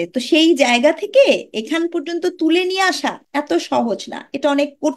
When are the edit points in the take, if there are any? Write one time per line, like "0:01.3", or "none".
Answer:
0:03.2

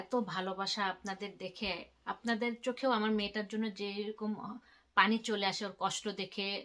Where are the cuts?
none

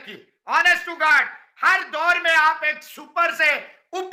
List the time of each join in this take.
none

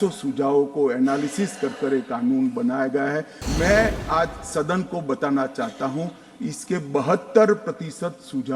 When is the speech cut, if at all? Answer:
0:03.4

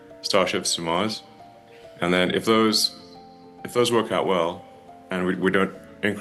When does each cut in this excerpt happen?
none

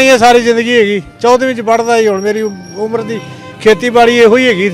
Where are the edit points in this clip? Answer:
none

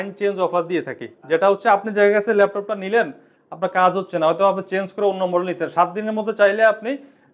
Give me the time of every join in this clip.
none

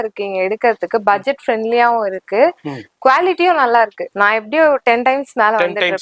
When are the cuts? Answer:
0:04.0

